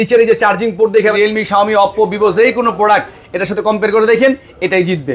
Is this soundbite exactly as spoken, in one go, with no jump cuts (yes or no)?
no